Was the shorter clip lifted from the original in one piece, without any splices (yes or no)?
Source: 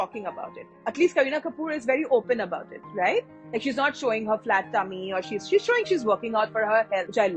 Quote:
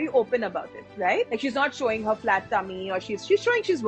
no